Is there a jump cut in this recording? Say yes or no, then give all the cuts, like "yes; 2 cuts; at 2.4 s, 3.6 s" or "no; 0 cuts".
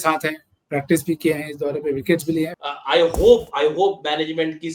yes; 1 cut; at 2.5 s